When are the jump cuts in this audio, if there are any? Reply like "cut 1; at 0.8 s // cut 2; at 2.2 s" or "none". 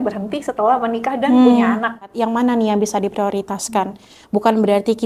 cut 1; at 2.1 s